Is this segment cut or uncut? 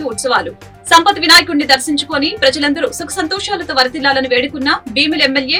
uncut